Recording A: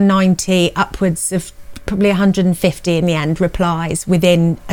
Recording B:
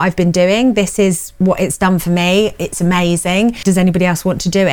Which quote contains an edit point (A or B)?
B